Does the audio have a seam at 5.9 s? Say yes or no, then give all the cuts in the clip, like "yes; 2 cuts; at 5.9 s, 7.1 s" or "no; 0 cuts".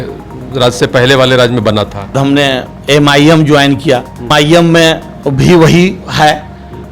no; 2 cuts; at 2.2 s, 4.3 s